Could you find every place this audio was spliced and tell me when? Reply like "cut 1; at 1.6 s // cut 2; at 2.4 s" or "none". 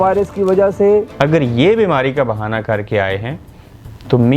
cut 1; at 1.1 s